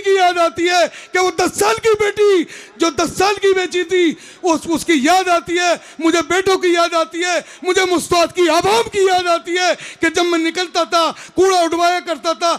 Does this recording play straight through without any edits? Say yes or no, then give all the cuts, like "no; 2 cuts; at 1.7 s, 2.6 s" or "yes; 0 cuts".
yes; 0 cuts